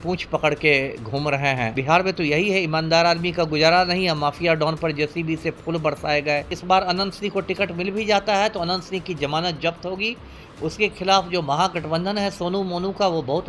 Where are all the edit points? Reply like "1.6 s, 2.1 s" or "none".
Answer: 1.8 s, 6.5 s